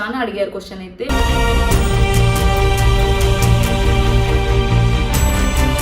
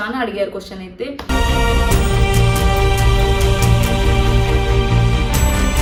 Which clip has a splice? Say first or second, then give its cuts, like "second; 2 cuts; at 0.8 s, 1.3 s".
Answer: first; 1 cut; at 1.1 s